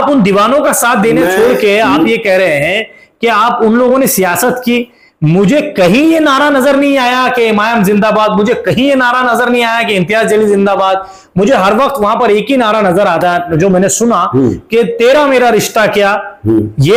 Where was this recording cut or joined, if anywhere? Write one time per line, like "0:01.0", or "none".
none